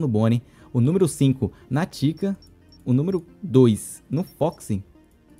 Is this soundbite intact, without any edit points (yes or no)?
yes